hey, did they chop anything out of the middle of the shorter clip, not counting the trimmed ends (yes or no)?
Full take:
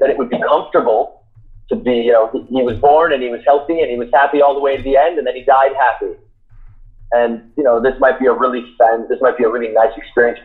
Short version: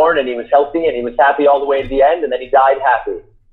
no